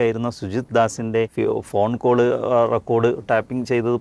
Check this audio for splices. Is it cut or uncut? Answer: cut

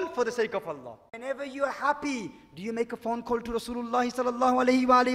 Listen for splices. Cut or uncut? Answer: cut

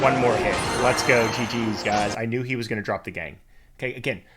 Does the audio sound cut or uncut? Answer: cut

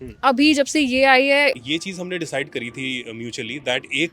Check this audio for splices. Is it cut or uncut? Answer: cut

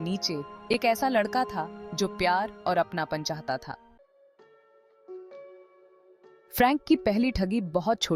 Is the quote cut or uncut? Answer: cut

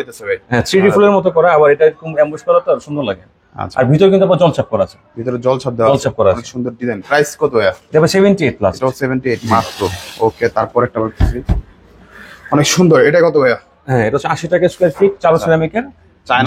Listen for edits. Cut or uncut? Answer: uncut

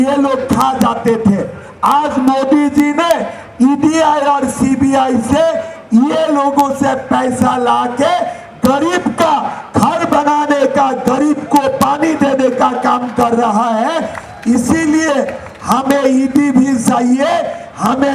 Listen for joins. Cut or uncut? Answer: uncut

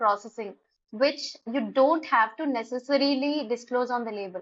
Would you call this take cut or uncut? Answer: uncut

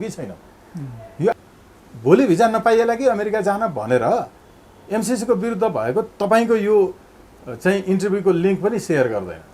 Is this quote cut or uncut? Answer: cut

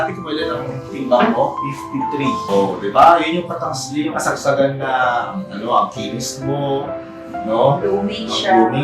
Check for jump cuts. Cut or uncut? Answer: cut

